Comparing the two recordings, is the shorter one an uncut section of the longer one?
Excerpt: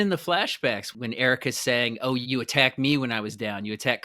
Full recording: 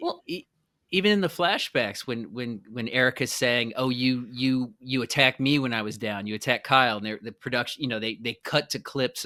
no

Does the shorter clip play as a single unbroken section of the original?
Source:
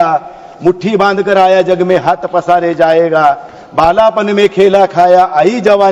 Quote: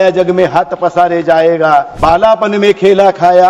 no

